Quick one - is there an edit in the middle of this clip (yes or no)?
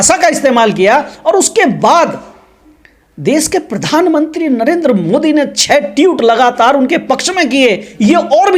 no